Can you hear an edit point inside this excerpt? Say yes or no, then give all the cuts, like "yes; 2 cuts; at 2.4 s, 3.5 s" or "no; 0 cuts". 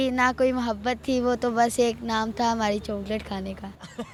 no; 0 cuts